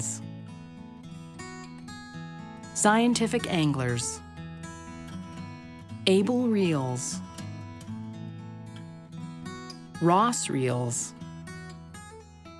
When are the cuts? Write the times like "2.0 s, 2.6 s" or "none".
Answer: 7.5 s, 10.0 s

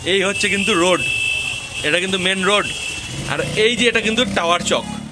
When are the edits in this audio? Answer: none

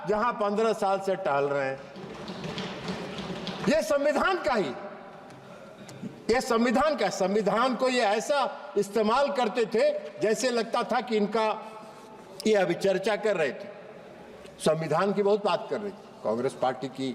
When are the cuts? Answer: none

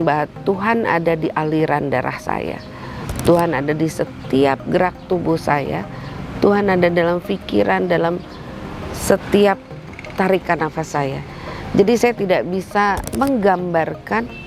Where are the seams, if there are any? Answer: none

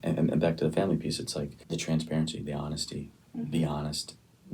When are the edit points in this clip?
1.6 s

